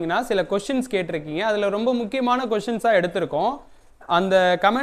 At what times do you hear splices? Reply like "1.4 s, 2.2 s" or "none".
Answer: none